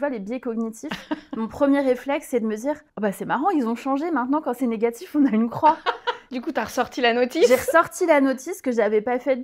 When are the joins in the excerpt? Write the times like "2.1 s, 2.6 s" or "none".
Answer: 2.9 s, 6.2 s